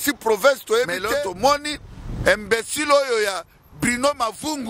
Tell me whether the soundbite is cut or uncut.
cut